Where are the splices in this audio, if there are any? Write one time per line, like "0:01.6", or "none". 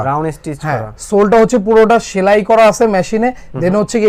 none